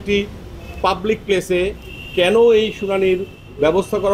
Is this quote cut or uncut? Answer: uncut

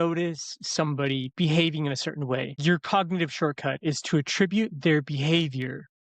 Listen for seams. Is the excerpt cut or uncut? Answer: cut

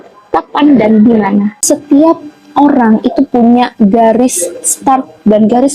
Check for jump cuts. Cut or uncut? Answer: cut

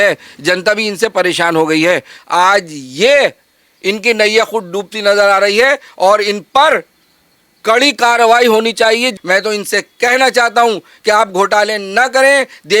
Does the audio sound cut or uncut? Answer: cut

